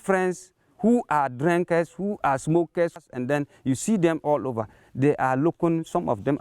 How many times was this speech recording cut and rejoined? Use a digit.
1